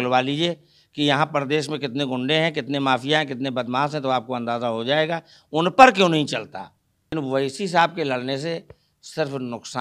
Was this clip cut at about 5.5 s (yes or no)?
no